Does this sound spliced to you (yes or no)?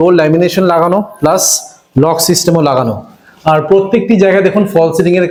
no